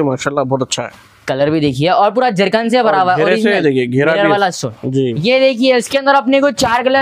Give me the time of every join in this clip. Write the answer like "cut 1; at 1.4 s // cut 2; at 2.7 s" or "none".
cut 1; at 5.1 s